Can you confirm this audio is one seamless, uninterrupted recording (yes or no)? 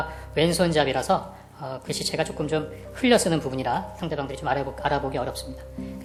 yes